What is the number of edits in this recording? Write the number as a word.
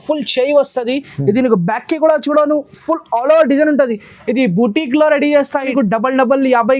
one